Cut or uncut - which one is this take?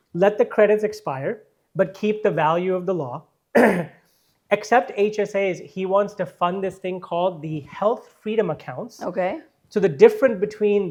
uncut